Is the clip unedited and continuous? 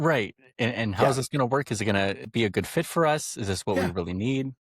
no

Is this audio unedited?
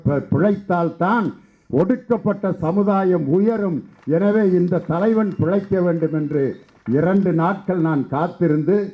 yes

